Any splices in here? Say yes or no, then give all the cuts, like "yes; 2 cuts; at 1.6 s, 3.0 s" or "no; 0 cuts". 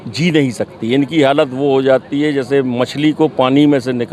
no; 0 cuts